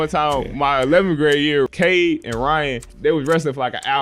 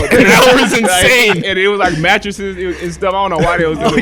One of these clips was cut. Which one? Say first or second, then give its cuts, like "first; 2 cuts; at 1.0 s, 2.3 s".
first; 2 cuts; at 1.7 s, 2.9 s